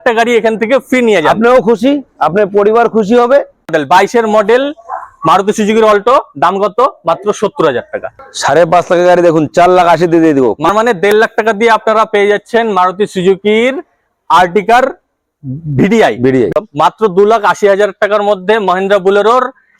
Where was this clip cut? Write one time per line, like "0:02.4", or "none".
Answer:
0:03.7
0:08.2
0:10.6
0:16.5